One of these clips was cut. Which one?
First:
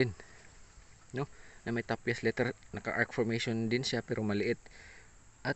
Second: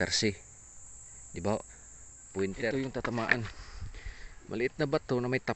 second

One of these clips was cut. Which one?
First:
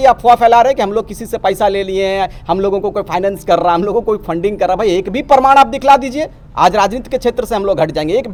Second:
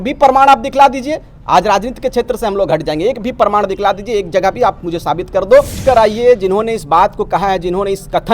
second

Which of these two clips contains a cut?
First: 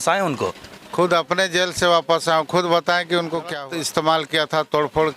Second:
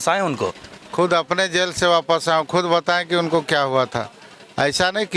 first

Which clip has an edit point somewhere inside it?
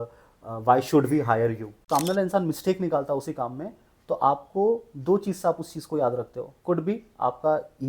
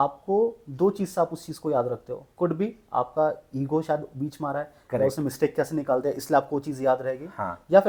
first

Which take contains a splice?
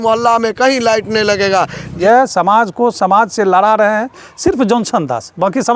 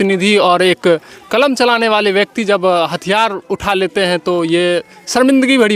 first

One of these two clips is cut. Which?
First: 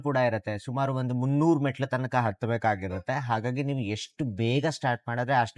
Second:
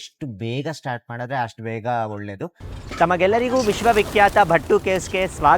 second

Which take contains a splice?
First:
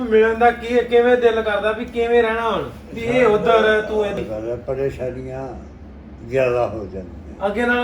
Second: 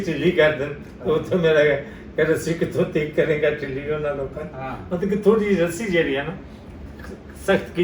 first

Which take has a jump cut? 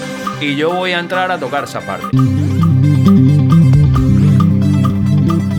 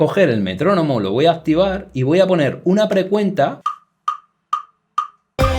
second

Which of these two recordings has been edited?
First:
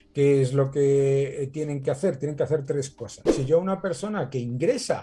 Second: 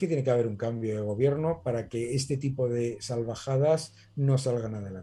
first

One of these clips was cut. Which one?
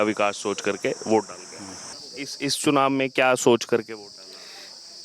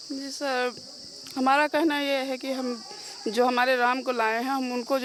first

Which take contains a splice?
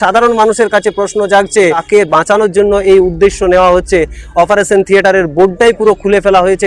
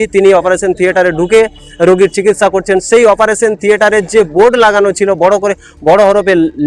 first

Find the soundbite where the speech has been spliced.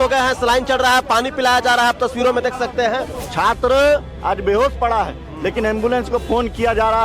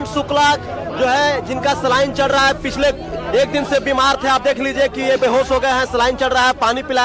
first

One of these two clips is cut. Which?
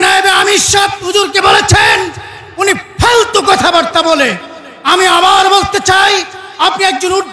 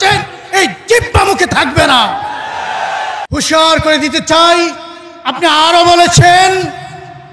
second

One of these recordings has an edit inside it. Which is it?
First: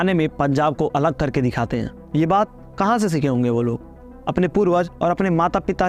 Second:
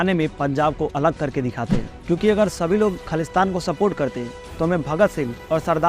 second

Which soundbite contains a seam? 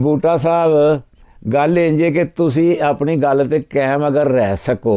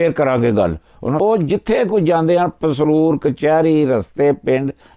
second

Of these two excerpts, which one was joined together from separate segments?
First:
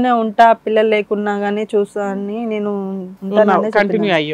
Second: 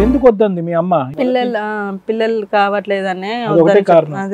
second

